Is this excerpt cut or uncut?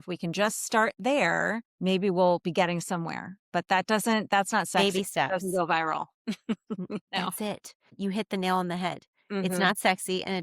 cut